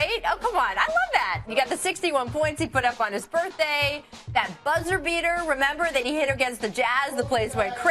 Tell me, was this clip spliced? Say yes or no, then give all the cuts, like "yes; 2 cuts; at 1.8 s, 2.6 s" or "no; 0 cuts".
yes; 1 cut; at 6.3 s